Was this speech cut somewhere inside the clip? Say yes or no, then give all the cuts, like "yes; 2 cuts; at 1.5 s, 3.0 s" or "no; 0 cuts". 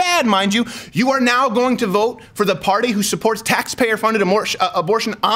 no; 0 cuts